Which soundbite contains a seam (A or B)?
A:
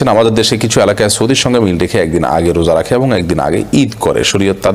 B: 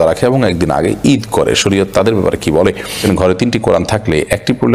B